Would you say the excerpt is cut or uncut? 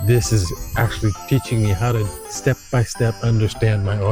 uncut